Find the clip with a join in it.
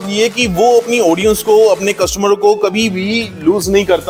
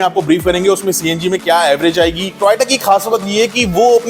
second; 1 cut; at 2.3 s

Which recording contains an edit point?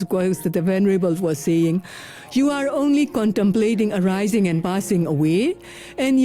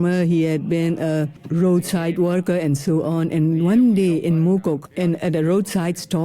second; 2 cuts; at 1.4 s, 4.9 s

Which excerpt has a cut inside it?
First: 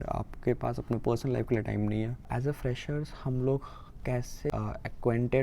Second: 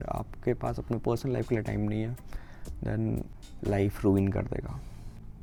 first; 2 cuts; at 2.3 s, 4.5 s

